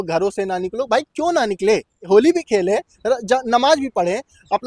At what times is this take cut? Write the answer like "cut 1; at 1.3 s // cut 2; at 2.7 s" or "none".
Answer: cut 1; at 2.0 s